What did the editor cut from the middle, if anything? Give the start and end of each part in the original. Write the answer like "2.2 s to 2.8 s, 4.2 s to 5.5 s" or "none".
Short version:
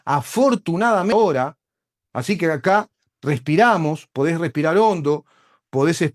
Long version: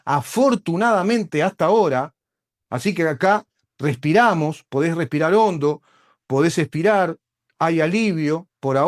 1.1 s to 1.7 s